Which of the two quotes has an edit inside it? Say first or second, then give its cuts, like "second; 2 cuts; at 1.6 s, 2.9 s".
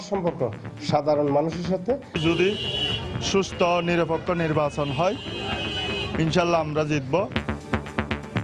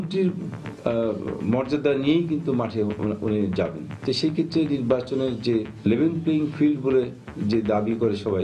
first; 2 cuts; at 2.2 s, 7.4 s